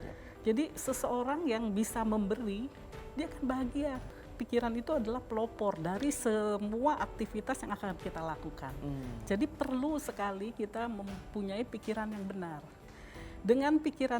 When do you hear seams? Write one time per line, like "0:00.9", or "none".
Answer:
0:04.0